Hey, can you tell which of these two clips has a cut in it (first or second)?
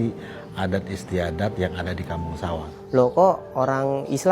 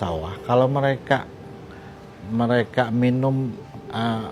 first